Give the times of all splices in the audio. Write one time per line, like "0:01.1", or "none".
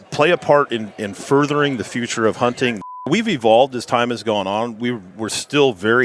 0:03.0